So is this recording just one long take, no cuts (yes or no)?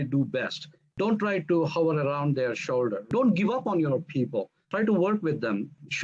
yes